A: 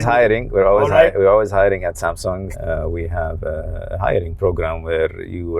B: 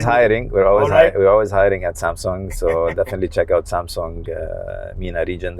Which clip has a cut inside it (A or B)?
A